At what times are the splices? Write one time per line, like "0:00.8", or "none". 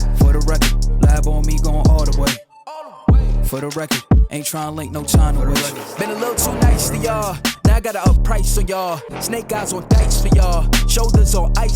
0:05.6